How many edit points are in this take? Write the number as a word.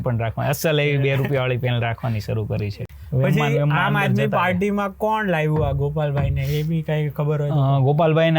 one